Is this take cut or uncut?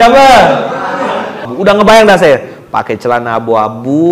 cut